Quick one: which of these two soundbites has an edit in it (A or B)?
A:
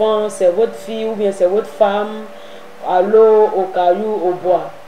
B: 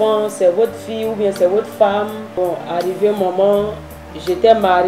B